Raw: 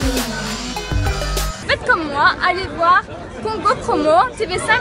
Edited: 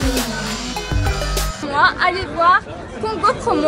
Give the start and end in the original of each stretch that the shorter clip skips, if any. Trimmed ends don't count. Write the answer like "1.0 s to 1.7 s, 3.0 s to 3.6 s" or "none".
1.6 s to 2.0 s